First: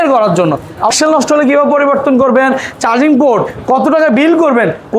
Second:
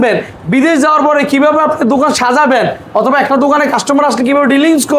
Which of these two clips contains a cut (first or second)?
first